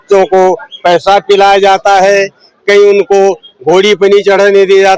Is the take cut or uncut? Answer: uncut